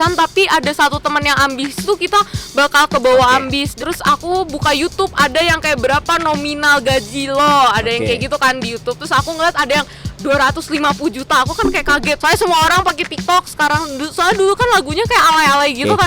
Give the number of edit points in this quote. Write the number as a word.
two